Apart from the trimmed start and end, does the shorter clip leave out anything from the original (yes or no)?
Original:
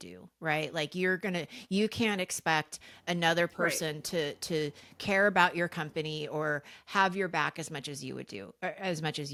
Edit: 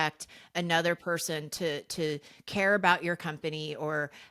no